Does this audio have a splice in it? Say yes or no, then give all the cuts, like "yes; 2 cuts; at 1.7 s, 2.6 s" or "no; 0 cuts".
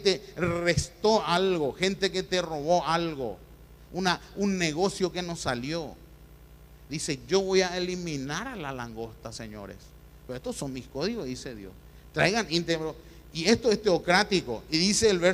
no; 0 cuts